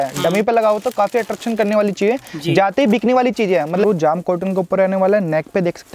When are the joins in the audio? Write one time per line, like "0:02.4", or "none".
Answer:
0:03.8